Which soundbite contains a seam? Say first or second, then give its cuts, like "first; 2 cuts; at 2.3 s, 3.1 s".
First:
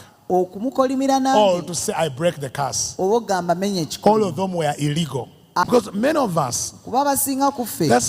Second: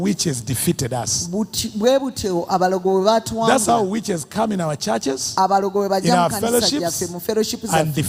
first; 1 cut; at 5.6 s